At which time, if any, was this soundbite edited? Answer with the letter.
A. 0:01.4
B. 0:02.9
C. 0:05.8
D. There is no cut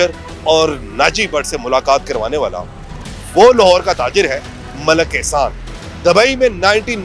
D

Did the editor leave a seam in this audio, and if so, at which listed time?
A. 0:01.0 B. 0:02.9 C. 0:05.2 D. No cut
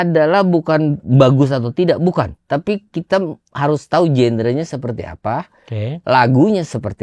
A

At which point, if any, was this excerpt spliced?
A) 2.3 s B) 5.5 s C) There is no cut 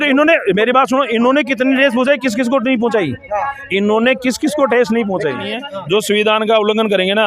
B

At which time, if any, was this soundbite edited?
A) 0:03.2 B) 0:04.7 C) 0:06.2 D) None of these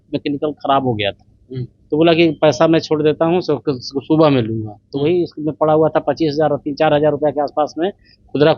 D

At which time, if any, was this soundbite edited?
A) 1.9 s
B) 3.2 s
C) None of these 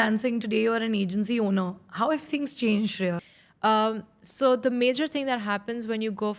B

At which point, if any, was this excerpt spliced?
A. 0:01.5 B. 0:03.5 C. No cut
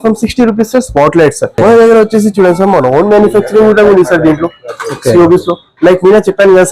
A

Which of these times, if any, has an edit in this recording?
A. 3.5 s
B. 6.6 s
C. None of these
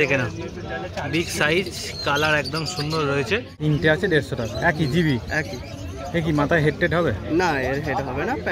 A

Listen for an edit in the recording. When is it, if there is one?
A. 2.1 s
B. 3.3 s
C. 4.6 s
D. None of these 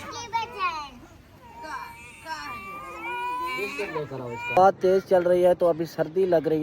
C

